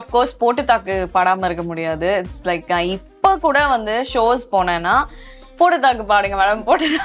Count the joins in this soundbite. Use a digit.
0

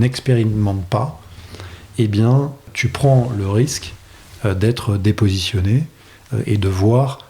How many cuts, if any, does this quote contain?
1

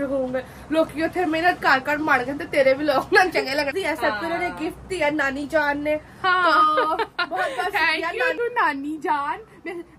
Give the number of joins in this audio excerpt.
2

